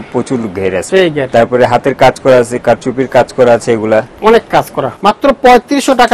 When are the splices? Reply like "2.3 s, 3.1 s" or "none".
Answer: 0.8 s, 4.8 s